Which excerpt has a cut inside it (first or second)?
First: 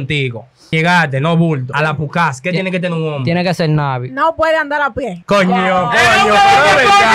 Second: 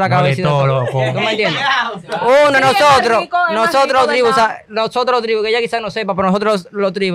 first